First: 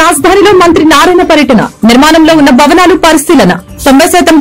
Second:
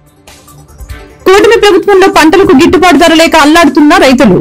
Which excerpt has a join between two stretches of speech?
second; 1 cut; at 1.1 s

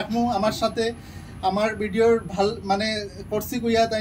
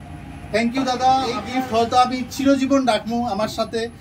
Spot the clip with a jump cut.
second; 1 cut; at 1.4 s

